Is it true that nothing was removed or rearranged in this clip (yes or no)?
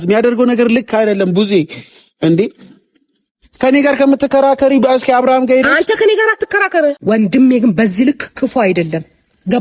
no